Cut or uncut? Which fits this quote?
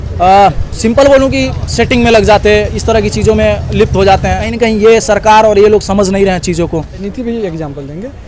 cut